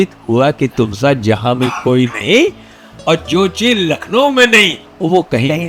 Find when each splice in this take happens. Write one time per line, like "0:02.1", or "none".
none